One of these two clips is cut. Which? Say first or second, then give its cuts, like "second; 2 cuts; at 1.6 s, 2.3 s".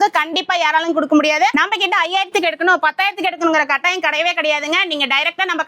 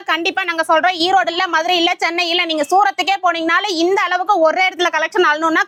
first; 1 cut; at 1.7 s